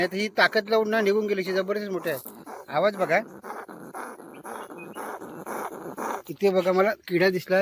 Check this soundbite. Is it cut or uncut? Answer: cut